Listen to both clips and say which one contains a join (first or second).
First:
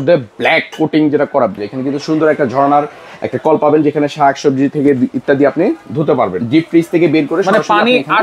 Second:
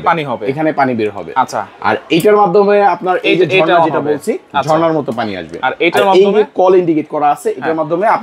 first